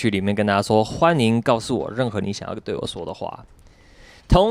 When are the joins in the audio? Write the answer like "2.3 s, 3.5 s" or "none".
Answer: none